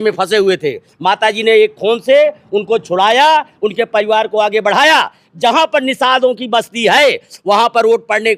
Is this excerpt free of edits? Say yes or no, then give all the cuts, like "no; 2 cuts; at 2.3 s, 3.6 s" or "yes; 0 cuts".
yes; 0 cuts